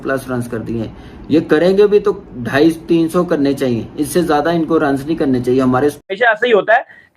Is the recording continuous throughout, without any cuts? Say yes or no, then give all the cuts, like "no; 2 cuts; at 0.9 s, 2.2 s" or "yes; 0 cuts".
no; 2 cuts; at 1.0 s, 6.0 s